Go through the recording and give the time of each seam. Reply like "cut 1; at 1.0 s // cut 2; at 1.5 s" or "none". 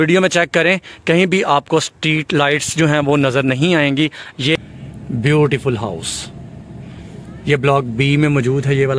cut 1; at 4.6 s